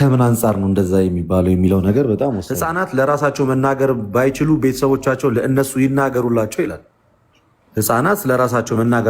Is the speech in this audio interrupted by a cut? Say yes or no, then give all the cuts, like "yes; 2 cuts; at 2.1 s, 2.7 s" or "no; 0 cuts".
yes; 1 cut; at 2.5 s